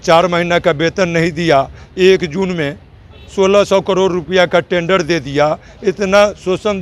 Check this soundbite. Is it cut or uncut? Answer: uncut